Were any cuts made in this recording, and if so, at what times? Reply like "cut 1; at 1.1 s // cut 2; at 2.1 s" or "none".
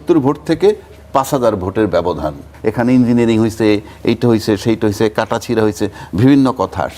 cut 1; at 2.5 s

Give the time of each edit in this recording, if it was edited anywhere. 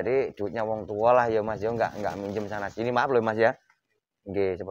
none

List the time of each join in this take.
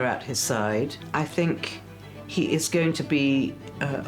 cut 1; at 1.0 s

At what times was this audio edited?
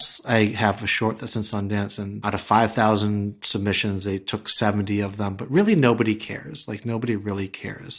cut 1; at 2.2 s

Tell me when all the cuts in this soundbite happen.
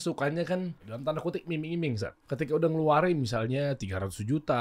cut 1; at 0.9 s // cut 2; at 2.2 s

